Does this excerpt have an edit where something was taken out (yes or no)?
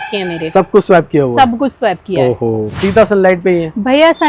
yes